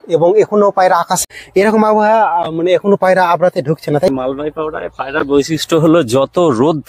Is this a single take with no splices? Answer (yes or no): no